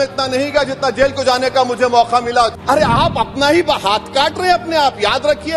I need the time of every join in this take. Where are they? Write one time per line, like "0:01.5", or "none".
0:02.5